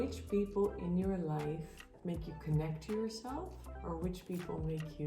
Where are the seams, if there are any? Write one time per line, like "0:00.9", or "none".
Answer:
0:01.8